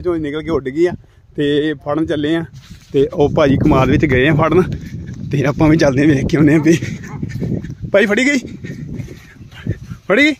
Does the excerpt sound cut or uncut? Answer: uncut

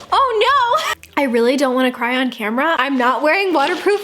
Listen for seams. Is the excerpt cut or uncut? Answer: cut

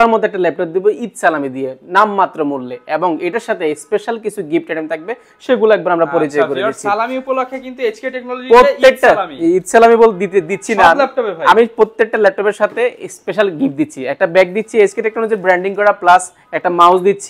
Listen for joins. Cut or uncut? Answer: uncut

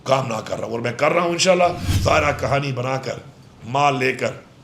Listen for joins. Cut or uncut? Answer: cut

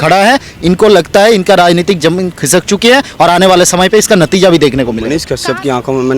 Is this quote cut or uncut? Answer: cut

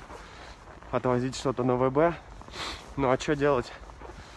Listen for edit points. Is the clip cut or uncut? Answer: uncut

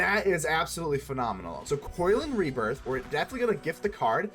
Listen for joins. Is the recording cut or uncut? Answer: cut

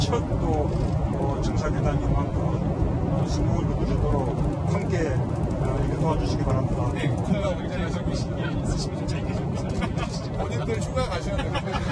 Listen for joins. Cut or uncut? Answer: uncut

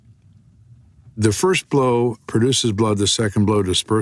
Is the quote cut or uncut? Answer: cut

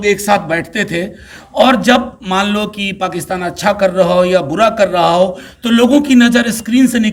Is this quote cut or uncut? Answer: uncut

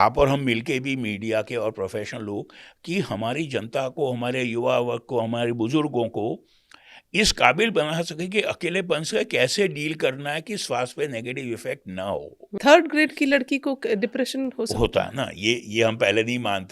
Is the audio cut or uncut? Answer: cut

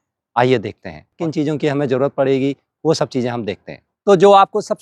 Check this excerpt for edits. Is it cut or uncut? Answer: uncut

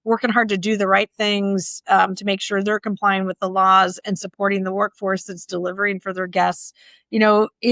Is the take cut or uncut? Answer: uncut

